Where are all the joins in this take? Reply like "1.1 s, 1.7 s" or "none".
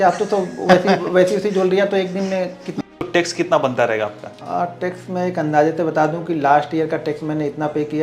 2.8 s, 4.3 s